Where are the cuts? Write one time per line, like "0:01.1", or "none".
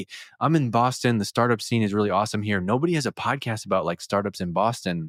none